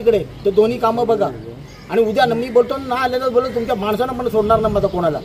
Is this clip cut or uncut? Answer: uncut